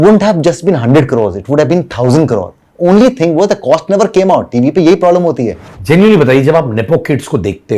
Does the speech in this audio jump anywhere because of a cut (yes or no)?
yes